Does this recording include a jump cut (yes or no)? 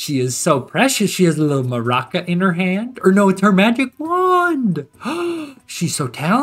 no